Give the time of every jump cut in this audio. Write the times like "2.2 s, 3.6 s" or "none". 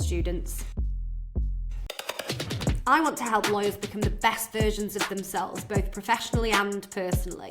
1.7 s